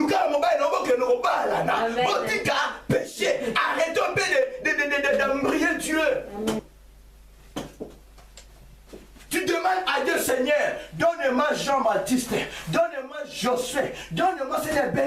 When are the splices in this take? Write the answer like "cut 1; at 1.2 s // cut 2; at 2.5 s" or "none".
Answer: cut 1; at 6.6 s